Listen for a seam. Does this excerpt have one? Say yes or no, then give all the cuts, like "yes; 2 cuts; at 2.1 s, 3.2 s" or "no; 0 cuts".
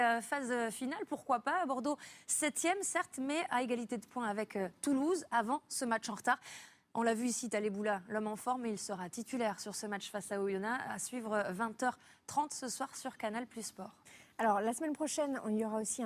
no; 0 cuts